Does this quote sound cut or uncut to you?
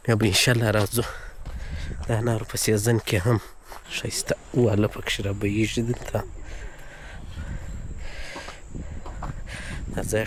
uncut